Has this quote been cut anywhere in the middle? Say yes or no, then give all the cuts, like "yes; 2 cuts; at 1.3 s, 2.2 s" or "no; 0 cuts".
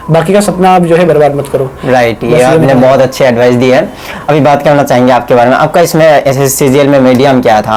no; 0 cuts